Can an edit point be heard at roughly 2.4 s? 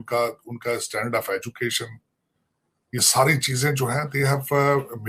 no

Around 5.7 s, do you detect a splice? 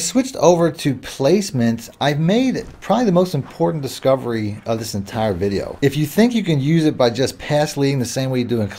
yes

